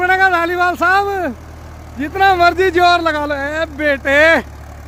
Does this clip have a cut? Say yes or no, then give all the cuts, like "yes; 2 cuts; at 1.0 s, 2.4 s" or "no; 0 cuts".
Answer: no; 0 cuts